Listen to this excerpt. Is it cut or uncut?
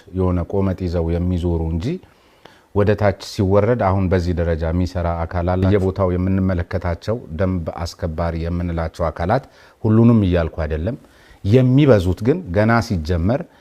cut